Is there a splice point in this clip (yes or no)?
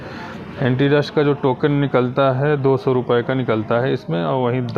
no